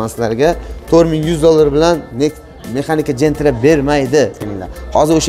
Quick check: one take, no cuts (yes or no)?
no